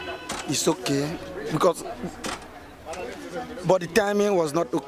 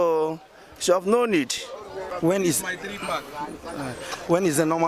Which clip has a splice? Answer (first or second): second